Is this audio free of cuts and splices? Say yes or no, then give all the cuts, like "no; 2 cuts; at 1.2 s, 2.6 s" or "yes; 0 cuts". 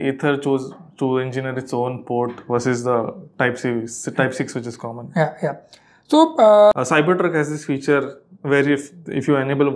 no; 1 cut; at 6.7 s